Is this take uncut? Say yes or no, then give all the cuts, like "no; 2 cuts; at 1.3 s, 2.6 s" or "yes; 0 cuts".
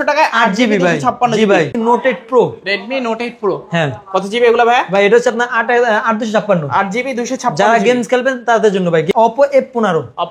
no; 2 cuts; at 1.7 s, 9.1 s